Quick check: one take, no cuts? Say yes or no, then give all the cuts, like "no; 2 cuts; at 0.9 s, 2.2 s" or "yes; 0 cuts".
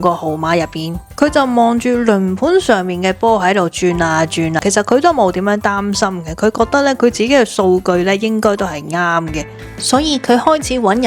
no; 3 cuts; at 1.1 s, 4.6 s, 9.5 s